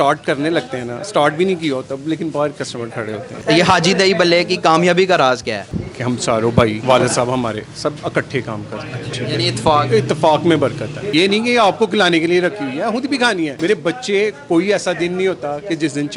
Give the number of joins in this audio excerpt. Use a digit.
6